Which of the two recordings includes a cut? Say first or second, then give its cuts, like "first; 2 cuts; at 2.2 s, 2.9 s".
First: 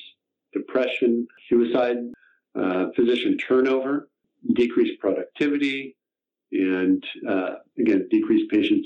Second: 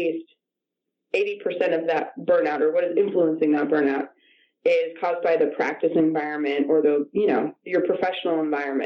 first; 3 cuts; at 1.4 s, 2.1 s, 4.3 s